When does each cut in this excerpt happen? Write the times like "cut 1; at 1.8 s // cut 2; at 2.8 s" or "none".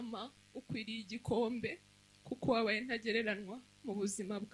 none